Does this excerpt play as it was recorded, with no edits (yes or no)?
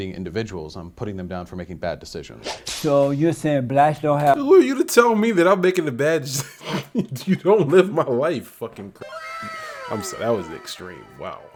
yes